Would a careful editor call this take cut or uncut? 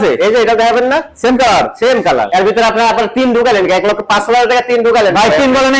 cut